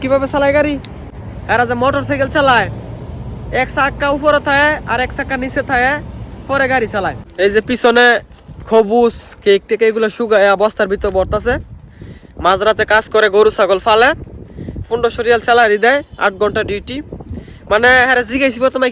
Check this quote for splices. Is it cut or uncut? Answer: cut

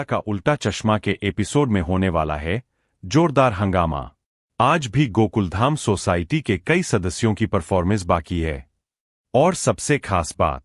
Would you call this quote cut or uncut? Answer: uncut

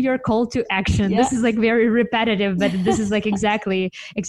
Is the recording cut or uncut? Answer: uncut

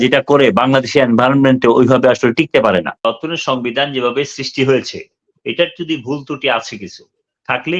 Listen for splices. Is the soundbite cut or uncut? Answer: cut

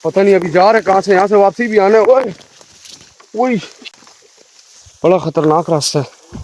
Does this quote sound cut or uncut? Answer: uncut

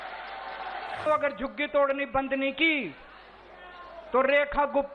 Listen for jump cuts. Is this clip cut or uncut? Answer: cut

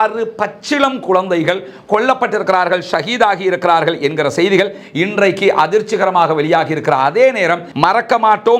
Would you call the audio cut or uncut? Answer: cut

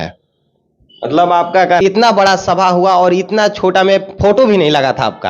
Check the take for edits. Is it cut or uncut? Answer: cut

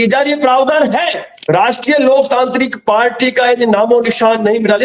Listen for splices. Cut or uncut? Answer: cut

